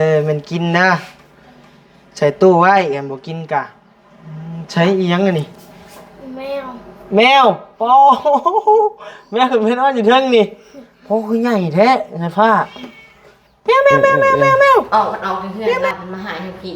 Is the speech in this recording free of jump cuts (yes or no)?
no